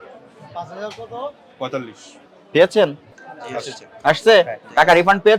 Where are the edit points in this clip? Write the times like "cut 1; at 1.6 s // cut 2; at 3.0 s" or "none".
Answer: none